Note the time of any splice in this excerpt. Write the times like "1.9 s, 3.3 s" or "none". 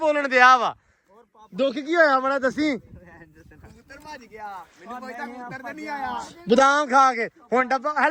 none

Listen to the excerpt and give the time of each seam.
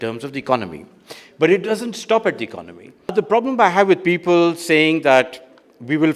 3.1 s

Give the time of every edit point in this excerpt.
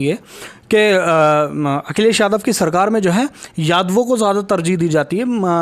none

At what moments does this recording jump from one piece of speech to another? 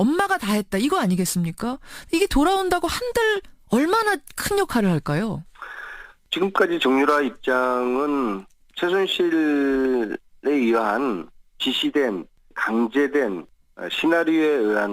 2.3 s

